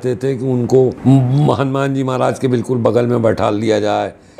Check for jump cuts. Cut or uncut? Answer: cut